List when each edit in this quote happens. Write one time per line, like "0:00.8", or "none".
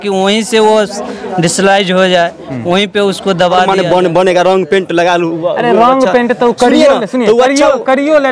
0:03.7